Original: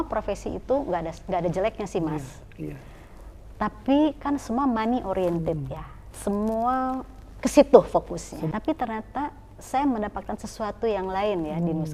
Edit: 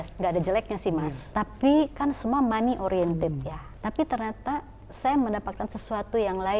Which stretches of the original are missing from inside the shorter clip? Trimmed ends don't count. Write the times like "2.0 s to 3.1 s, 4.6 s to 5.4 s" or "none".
2.3 s to 3.5 s, 6.0 s to 8.5 s